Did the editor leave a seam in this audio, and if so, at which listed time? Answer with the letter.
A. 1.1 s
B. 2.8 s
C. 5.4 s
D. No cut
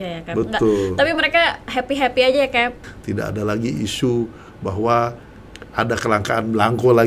B